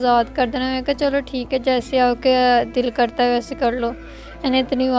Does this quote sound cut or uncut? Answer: uncut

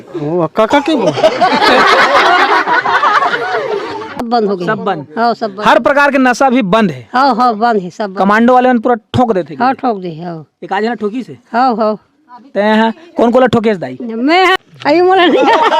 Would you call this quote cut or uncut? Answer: cut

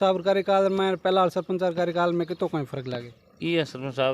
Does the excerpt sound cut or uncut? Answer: uncut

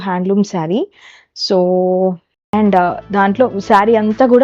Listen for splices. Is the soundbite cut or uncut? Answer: cut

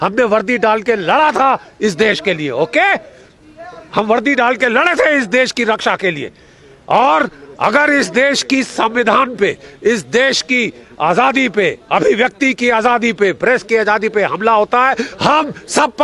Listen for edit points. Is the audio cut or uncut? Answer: uncut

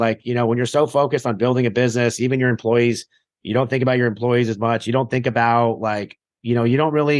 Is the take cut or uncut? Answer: uncut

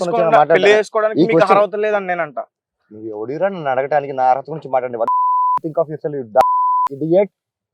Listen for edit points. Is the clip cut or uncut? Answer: uncut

